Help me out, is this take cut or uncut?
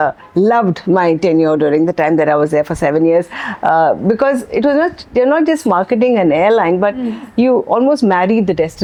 uncut